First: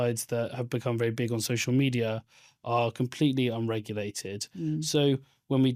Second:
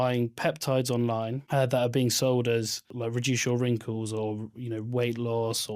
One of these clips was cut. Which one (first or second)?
second